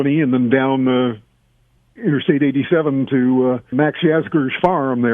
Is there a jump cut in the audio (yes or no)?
yes